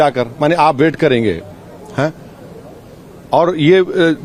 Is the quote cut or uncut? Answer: uncut